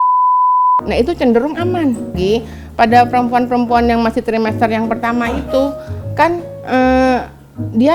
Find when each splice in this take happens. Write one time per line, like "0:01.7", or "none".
0:02.2